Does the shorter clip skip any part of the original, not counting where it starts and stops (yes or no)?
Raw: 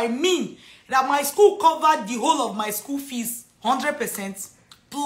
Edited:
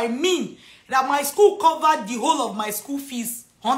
no